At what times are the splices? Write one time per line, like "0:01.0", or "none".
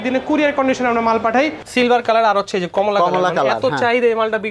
0:02.0